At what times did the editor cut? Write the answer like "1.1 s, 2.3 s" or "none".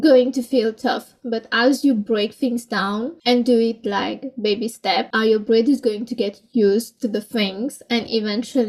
none